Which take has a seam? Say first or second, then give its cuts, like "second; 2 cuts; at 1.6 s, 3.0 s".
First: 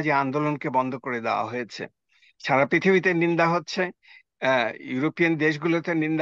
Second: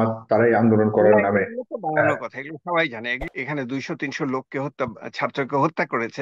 second; 1 cut; at 3.2 s